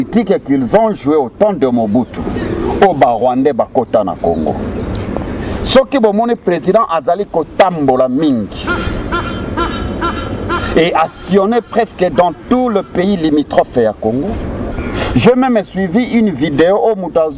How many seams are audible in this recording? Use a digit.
2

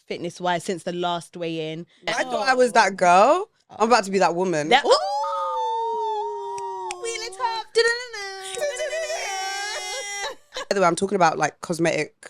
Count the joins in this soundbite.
2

